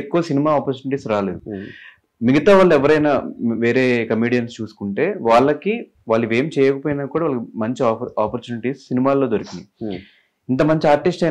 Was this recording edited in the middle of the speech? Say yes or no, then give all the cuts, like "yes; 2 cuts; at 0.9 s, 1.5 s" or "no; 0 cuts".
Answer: no; 0 cuts